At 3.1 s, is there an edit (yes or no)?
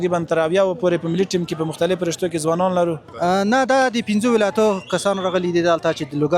yes